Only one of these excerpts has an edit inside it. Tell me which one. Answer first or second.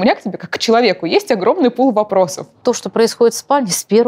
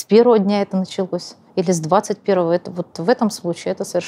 first